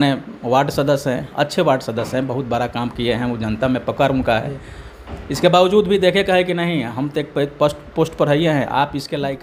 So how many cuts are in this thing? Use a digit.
0